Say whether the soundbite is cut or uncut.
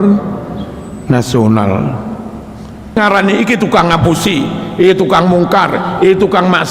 cut